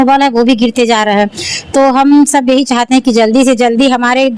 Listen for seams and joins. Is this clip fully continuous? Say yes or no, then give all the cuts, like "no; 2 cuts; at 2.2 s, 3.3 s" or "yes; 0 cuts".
yes; 0 cuts